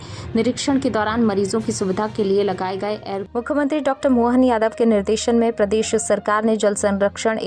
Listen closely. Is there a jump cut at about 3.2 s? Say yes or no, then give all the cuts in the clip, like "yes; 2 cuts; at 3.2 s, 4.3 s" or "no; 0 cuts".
yes; 1 cut; at 3.2 s